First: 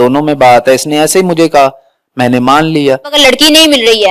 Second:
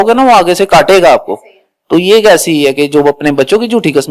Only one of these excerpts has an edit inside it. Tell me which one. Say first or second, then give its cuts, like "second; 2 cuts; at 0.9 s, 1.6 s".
first; 1 cut; at 3.1 s